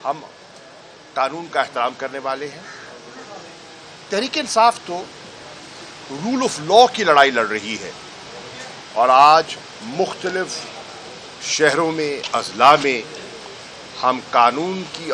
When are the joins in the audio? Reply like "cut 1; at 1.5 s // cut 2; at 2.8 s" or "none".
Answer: none